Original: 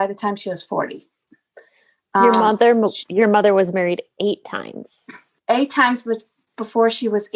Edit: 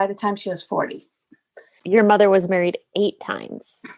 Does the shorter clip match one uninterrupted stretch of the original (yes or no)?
no